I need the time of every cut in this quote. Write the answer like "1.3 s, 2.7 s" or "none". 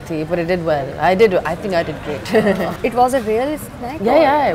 2.7 s